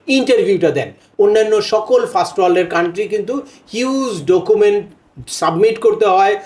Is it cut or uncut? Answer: cut